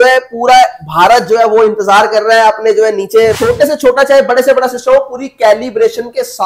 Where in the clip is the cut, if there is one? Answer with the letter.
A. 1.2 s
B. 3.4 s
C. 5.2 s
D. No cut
B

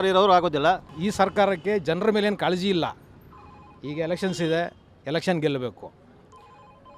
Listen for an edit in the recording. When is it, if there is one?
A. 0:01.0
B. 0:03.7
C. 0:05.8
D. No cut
A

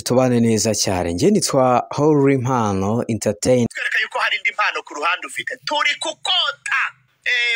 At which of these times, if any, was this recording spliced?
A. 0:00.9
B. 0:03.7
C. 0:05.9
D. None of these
B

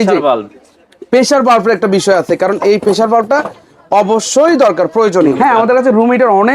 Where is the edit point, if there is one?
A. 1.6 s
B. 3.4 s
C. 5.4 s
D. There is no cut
C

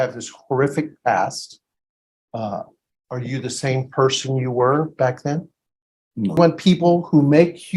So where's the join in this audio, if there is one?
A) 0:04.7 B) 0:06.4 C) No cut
B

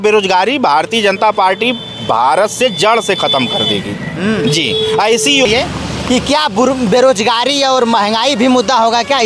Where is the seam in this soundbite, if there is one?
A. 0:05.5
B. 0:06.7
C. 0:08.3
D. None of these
A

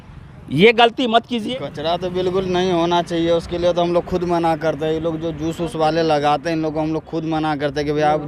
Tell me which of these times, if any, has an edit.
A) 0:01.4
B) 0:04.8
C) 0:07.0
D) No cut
A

